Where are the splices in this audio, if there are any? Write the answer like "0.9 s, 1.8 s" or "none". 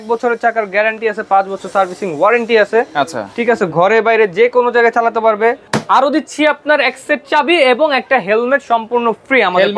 5.7 s